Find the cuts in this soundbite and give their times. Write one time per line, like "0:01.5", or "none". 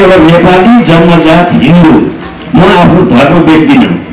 none